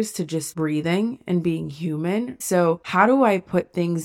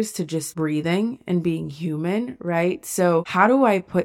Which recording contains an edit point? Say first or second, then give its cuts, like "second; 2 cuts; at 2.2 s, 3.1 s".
first; 1 cut; at 2.9 s